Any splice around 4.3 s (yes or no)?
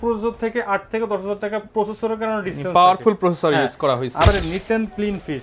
yes